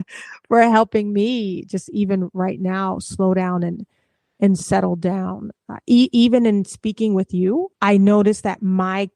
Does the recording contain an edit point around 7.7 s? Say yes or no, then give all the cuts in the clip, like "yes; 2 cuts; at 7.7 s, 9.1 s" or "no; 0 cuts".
yes; 1 cut; at 7.7 s